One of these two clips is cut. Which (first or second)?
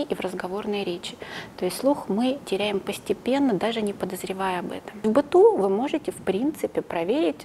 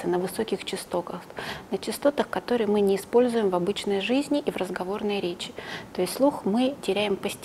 first